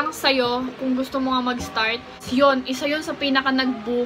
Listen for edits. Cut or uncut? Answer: cut